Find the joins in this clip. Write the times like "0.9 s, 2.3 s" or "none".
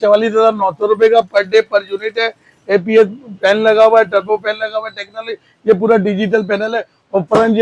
none